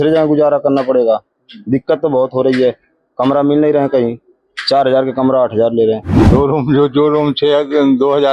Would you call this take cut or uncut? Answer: cut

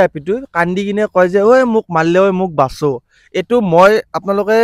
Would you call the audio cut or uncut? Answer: uncut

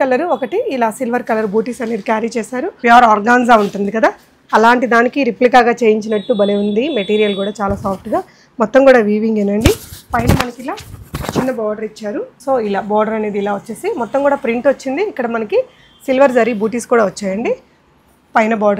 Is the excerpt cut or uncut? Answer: cut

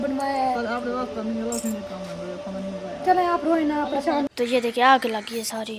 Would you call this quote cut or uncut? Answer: cut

